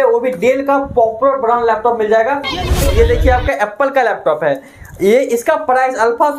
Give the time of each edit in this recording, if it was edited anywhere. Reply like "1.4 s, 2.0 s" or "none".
2.8 s